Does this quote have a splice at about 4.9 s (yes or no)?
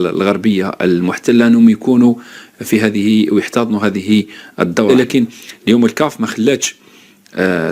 yes